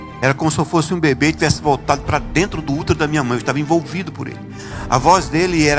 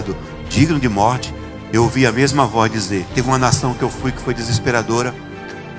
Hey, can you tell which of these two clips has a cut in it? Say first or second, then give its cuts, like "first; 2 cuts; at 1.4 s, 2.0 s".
second; 1 cut; at 3.1 s